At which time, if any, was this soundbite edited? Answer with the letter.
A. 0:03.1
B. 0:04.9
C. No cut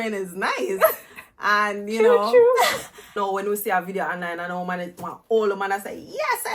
A